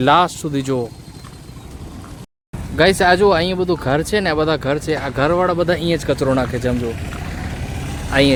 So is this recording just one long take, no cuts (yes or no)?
yes